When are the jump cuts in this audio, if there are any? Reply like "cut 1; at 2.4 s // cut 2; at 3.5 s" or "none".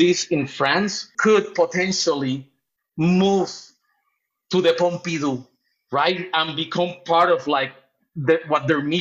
cut 1; at 1.1 s